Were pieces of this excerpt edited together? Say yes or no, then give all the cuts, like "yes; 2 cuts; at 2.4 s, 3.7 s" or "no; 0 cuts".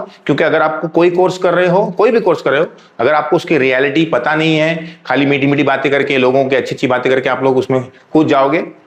no; 0 cuts